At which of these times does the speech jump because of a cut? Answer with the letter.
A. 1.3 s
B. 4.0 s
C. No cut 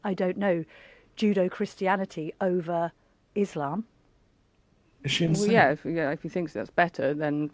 C